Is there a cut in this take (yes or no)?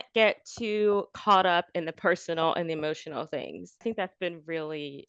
yes